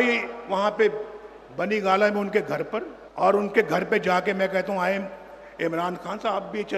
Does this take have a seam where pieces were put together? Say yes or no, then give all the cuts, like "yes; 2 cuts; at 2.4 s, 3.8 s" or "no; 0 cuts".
yes; 1 cut; at 3.0 s